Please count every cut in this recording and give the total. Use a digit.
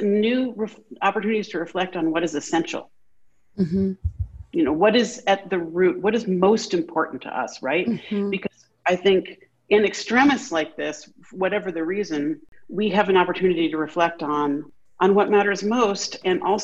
2